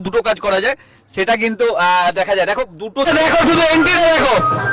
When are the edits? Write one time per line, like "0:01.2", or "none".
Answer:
0:03.1